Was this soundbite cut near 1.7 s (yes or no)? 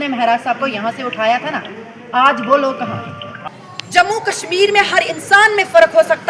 no